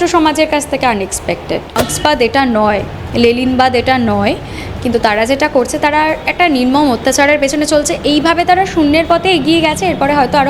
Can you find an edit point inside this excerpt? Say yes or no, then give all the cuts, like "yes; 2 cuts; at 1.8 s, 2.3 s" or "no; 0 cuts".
yes; 1 cut; at 1.8 s